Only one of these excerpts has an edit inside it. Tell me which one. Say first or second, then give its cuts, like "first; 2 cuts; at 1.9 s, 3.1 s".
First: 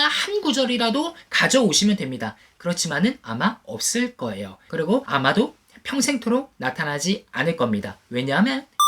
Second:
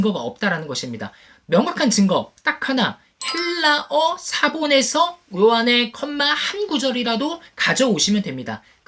first; 1 cut; at 4.8 s